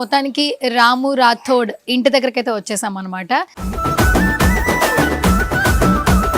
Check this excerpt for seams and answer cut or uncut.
cut